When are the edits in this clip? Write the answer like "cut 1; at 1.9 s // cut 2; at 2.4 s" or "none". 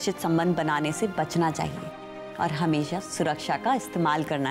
none